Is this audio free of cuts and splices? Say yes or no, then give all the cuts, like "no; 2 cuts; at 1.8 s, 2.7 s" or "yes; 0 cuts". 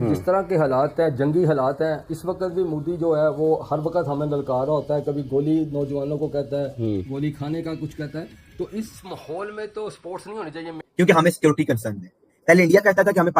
no; 1 cut; at 10.7 s